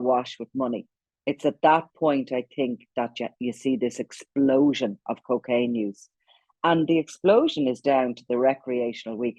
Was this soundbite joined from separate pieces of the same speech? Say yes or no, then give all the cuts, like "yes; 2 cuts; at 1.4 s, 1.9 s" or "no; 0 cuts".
no; 0 cuts